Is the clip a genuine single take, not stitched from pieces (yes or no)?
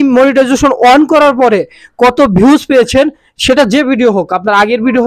yes